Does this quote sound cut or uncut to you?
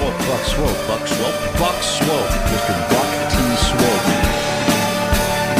uncut